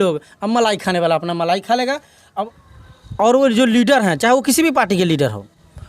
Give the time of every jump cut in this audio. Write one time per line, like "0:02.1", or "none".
0:02.6